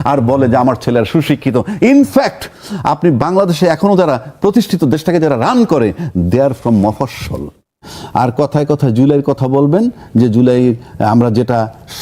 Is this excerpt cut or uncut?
cut